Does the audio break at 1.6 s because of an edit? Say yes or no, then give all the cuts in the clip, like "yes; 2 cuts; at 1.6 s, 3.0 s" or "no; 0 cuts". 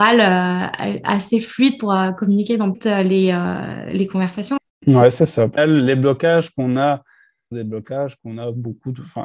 no; 4 cuts; at 2.8 s, 4.6 s, 5.6 s, 7.5 s